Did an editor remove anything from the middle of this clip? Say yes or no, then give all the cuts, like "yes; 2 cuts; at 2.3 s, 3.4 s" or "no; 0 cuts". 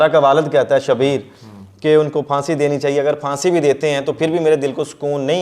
no; 0 cuts